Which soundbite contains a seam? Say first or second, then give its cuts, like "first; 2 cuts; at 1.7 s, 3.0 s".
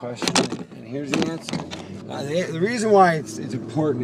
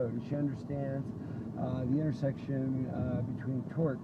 first; 1 cut; at 1.7 s